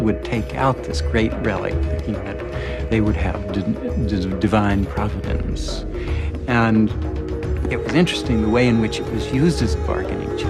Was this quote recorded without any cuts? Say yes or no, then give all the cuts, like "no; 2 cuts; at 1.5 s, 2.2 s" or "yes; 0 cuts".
no; 1 cut; at 6.7 s